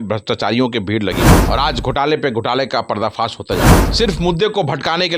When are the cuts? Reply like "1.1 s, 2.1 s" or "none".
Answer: 1.4 s, 3.8 s